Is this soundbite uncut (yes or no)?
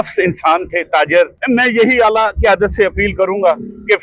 no